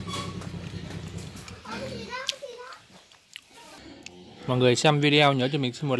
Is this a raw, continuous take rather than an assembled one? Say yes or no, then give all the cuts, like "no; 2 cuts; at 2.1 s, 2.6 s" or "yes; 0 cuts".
no; 1 cut; at 3.8 s